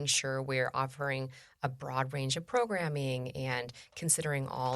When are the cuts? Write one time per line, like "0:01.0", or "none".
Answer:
none